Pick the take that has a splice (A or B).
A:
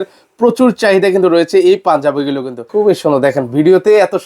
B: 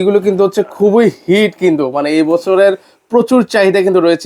A